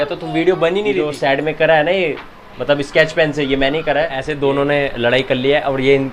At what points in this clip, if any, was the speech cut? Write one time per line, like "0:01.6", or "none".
0:01.1
0:04.2